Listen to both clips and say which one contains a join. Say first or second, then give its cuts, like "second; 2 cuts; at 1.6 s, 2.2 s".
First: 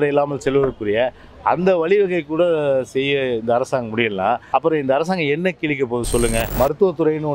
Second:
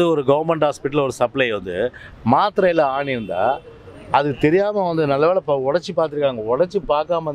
first; 2 cuts; at 4.4 s, 6.5 s